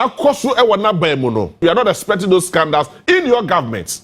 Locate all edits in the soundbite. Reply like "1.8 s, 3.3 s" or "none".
1.6 s